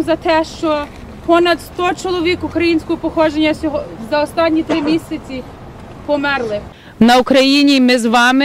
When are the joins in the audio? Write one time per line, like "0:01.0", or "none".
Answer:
0:06.8